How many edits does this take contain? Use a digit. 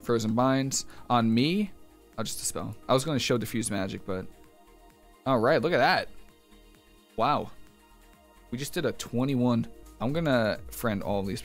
1